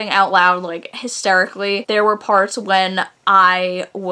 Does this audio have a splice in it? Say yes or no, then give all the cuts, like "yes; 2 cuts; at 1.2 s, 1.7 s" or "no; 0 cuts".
no; 0 cuts